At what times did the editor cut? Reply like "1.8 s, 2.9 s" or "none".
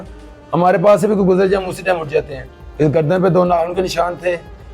2.6 s